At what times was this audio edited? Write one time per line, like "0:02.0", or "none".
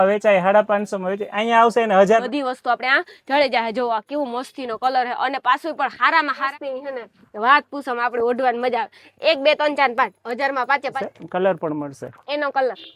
0:02.2
0:06.5
0:11.0